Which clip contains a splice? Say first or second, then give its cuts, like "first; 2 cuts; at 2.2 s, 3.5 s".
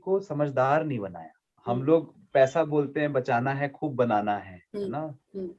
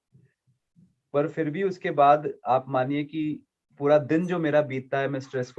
first; 1 cut; at 1.5 s